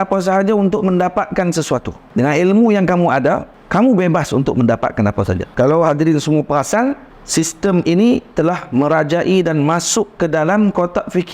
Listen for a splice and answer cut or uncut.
cut